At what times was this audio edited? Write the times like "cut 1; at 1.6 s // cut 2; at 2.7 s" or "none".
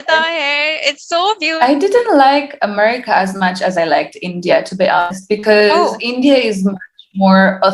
cut 1; at 1.5 s